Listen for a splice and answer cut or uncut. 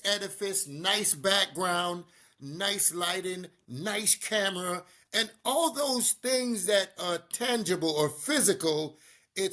uncut